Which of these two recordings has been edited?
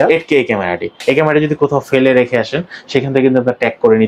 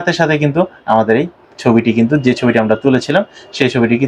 first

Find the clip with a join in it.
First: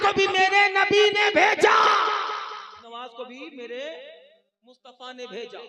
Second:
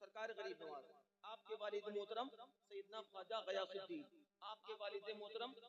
first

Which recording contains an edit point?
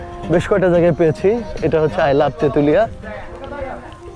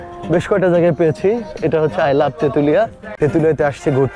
second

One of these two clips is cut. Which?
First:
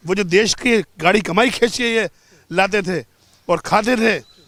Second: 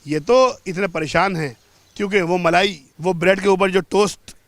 second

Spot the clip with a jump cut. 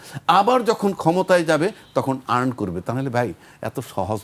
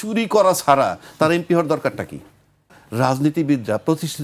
second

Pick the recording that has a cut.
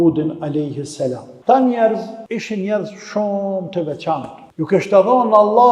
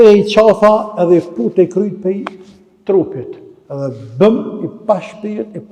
first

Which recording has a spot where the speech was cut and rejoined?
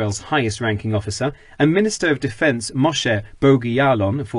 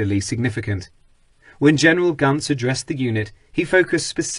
first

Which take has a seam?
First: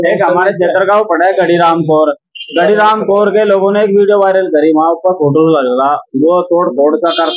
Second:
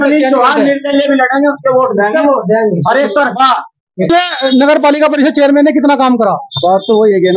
second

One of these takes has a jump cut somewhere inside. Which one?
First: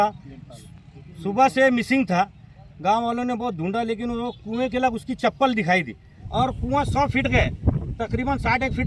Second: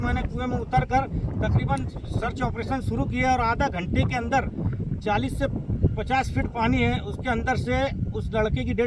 first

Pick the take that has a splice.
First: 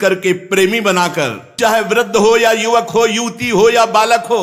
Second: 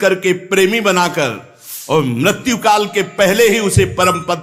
first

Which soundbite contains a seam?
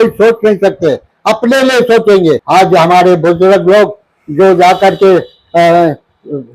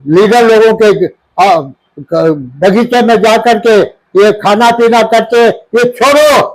first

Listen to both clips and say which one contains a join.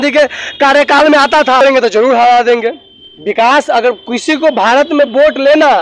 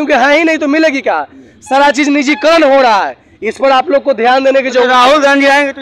first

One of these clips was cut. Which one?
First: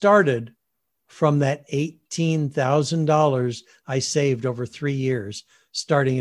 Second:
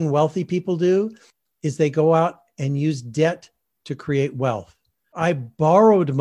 second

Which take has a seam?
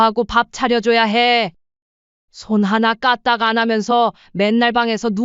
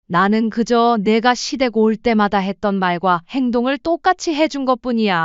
first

